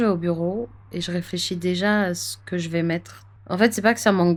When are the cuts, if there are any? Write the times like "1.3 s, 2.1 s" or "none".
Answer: none